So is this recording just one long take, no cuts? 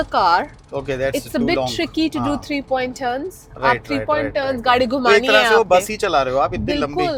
yes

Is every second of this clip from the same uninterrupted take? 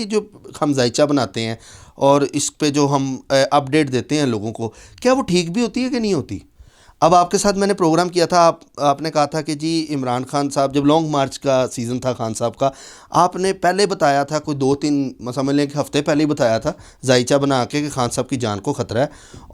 yes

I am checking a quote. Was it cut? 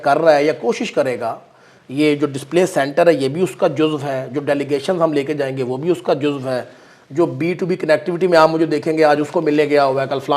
no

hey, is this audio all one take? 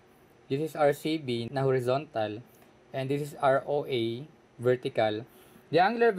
no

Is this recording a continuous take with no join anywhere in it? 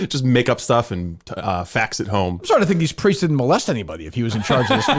yes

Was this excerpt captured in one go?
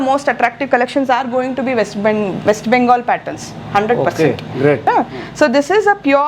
no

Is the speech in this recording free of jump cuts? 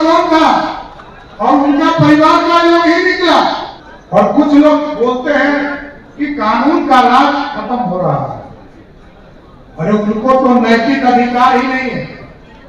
no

